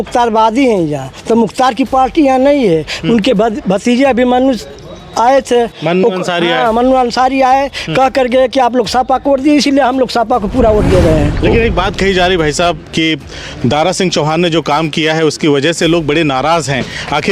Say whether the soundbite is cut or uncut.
cut